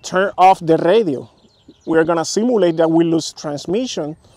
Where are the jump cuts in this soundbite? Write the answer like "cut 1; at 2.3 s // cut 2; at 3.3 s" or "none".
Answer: none